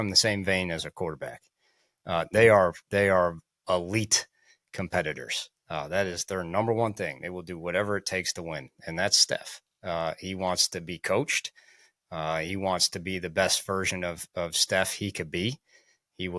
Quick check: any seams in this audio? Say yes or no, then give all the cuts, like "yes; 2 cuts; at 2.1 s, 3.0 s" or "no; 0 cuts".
no; 0 cuts